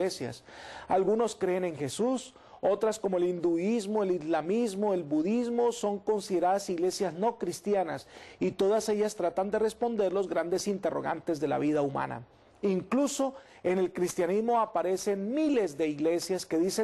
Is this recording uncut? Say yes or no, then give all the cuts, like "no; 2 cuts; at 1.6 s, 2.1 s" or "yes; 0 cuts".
yes; 0 cuts